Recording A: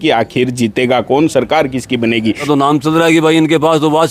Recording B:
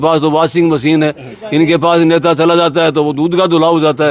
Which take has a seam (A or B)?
A